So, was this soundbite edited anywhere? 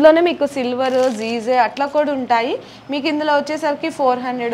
no; 0 cuts

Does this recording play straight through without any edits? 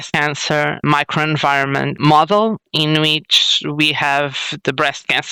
yes; 0 cuts

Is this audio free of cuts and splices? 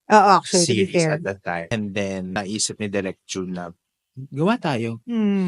no; 2 cuts; at 1.6 s, 2.4 s

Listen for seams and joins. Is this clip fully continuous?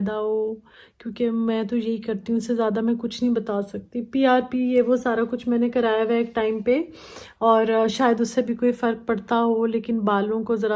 yes; 0 cuts

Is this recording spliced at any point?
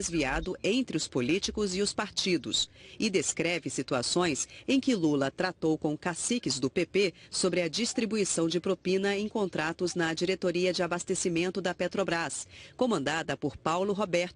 yes; 1 cut; at 6.3 s

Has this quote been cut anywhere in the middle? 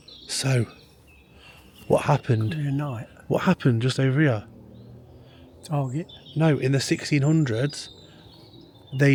no; 0 cuts

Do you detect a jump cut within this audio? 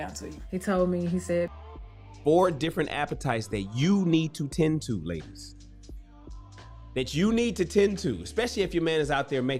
no; 0 cuts

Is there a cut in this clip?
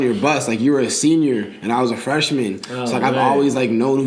no; 0 cuts

